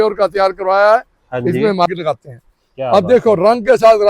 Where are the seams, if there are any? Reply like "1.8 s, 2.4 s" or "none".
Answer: 1.9 s